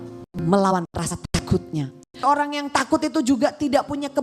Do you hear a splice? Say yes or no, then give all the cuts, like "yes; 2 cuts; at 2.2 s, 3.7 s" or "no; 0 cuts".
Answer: yes; 1 cut; at 2.2 s